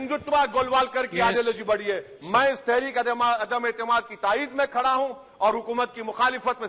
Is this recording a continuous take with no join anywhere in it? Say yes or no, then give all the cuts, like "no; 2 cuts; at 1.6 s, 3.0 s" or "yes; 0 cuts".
yes; 0 cuts